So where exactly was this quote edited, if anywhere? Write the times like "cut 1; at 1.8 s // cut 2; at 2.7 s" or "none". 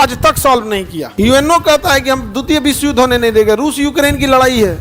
cut 1; at 1.0 s